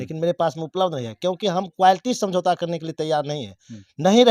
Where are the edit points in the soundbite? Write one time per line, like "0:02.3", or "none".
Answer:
none